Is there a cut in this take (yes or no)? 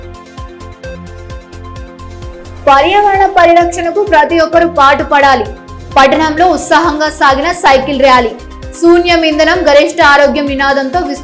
yes